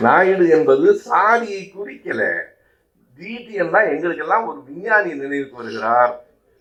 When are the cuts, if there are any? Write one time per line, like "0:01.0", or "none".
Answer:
none